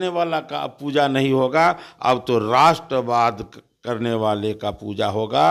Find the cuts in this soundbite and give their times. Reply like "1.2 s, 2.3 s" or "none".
none